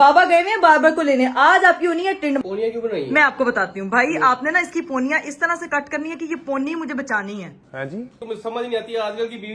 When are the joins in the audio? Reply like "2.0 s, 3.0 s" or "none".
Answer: 2.4 s, 8.1 s